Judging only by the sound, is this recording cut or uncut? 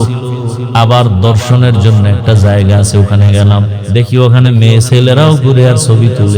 cut